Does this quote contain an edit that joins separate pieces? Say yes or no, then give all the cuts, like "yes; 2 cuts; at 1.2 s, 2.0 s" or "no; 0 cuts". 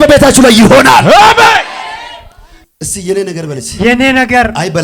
yes; 1 cut; at 2.5 s